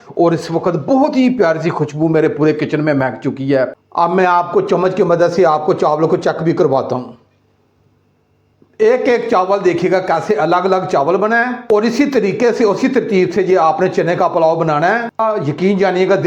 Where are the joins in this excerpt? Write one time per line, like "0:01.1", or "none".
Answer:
0:04.1
0:15.2